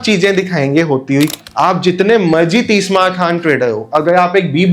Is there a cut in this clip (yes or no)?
yes